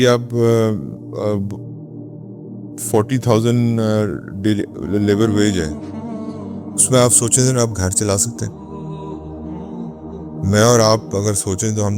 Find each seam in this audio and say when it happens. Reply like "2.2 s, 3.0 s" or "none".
5.7 s, 6.9 s, 8.3 s, 9.7 s